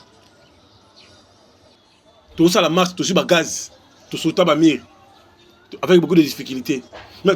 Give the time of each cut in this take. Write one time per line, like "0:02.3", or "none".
0:01.8

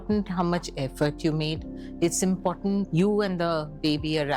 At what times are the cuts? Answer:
0:02.8

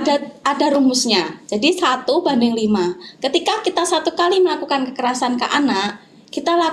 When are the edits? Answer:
none

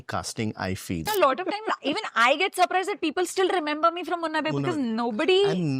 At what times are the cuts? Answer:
0:01.1

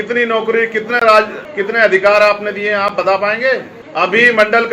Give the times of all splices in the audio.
0:01.4
0:03.8

